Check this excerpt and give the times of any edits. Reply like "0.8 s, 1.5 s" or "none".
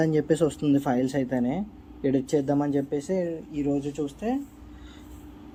none